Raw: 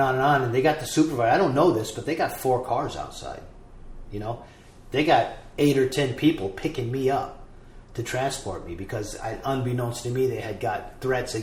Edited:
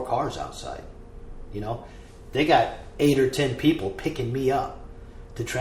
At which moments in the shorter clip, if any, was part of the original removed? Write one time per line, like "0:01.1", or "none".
none